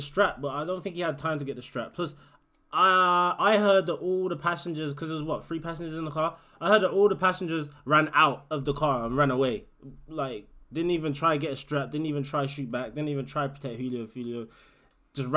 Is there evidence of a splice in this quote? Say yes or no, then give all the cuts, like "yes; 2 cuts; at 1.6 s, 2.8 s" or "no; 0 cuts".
no; 0 cuts